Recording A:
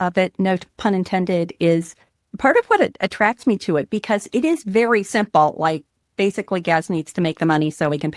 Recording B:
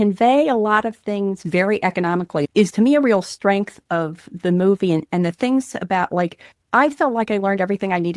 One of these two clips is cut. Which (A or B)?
B